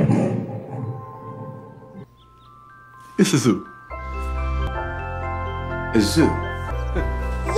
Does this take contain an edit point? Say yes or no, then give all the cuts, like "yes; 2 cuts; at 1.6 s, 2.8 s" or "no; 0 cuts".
no; 0 cuts